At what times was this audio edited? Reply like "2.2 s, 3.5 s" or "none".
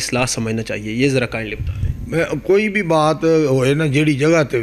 none